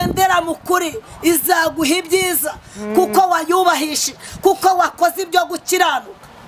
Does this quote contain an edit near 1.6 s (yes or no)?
no